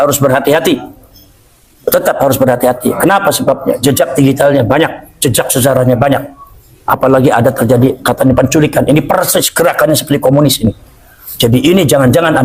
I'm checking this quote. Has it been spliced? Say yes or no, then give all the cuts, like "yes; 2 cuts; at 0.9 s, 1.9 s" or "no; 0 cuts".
no; 0 cuts